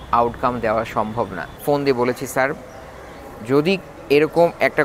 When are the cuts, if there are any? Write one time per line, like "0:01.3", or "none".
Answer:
0:01.5